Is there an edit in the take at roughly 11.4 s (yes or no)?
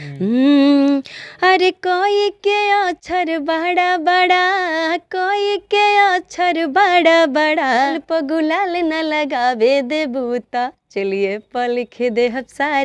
no